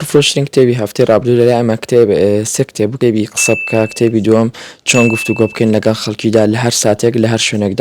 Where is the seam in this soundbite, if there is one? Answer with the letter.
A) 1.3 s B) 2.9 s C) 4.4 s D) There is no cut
B